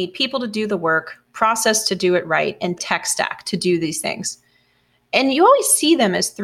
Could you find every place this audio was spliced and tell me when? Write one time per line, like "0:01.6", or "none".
0:02.8